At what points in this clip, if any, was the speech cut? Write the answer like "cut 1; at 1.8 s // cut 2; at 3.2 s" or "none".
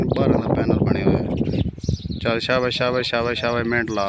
cut 1; at 1.6 s